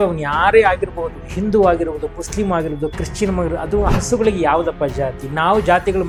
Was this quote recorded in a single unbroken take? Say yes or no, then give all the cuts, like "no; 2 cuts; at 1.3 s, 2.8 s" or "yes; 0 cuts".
yes; 0 cuts